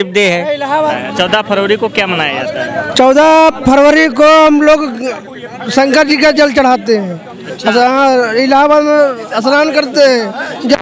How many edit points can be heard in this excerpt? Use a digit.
0